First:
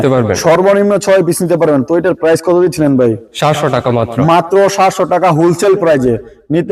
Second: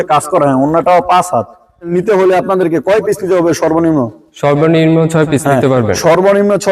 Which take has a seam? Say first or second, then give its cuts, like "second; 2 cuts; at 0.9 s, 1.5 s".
second; 1 cut; at 1.9 s